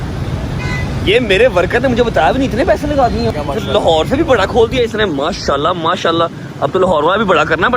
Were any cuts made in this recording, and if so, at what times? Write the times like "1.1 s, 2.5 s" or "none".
3.3 s